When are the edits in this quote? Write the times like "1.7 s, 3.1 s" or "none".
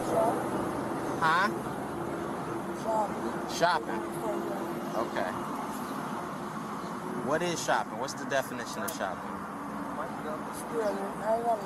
none